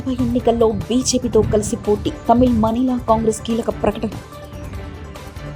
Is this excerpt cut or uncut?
uncut